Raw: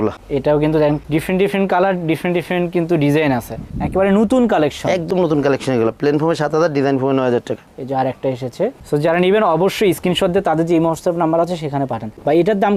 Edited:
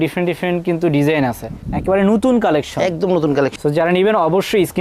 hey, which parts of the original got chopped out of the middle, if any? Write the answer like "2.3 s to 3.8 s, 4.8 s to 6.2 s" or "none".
5.6 s to 8.8 s